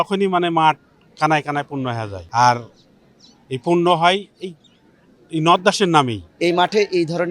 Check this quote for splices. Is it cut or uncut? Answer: cut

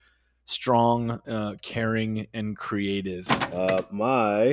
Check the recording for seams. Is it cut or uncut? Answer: cut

